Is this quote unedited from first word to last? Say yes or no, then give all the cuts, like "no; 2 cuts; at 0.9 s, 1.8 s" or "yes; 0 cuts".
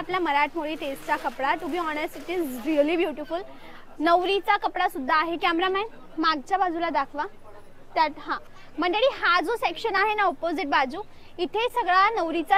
yes; 0 cuts